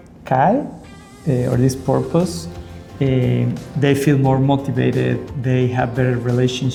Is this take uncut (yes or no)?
yes